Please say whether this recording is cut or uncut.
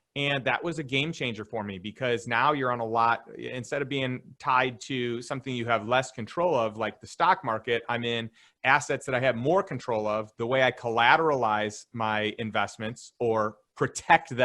uncut